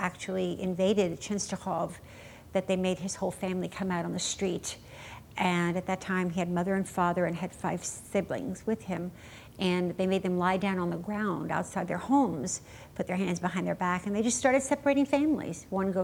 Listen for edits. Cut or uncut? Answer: uncut